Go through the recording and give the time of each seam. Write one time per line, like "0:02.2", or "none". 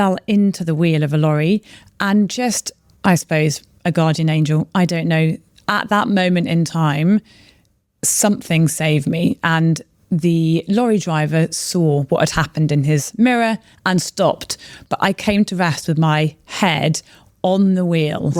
none